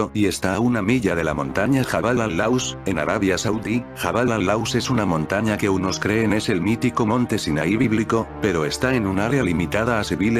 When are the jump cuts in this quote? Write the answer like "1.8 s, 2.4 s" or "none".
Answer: 3.5 s